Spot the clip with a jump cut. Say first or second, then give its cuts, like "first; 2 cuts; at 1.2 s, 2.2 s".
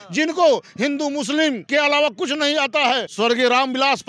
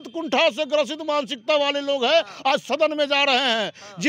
first; 2 cuts; at 1.6 s, 3.1 s